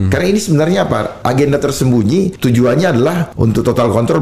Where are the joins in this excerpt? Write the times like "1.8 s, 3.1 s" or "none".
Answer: 1.1 s, 2.3 s, 3.3 s